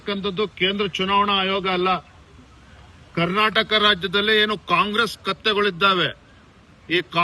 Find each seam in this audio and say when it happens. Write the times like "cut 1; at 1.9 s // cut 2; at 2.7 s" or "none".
none